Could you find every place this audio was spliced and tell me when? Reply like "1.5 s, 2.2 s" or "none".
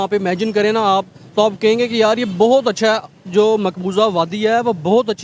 none